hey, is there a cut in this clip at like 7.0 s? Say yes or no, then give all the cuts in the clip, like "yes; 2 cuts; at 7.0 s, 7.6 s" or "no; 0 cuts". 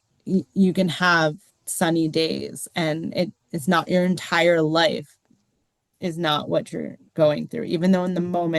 yes; 1 cut; at 7.0 s